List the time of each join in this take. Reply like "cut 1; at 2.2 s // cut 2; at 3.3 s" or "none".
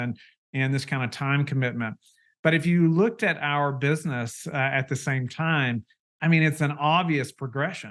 cut 1; at 6.1 s

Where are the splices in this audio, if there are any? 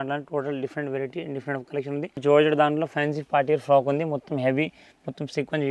cut 1; at 2.2 s

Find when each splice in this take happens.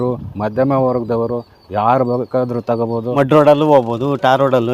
cut 1; at 3.1 s

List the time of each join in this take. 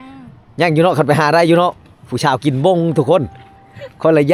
none

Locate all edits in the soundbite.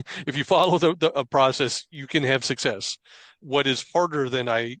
cut 1; at 3.4 s

